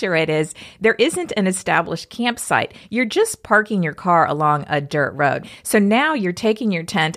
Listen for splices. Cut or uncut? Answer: cut